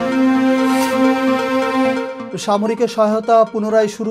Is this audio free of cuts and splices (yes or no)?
yes